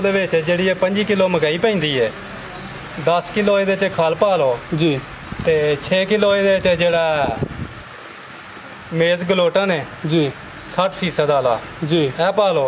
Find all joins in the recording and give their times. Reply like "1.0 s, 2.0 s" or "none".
none